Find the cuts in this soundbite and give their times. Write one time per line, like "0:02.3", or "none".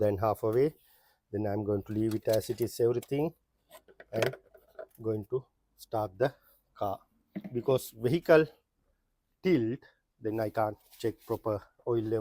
none